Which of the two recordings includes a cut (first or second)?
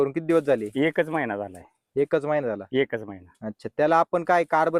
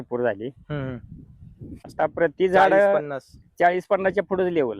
second